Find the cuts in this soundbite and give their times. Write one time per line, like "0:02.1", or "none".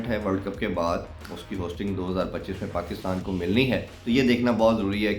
0:03.9